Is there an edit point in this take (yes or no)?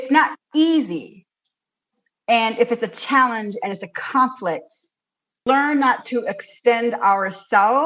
yes